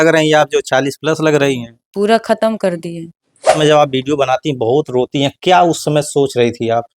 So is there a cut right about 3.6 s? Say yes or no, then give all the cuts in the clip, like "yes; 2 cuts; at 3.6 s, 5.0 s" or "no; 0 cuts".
yes; 1 cut; at 3.6 s